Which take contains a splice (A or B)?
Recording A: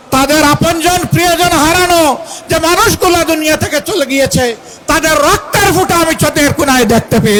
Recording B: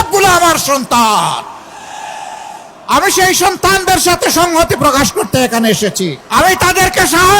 B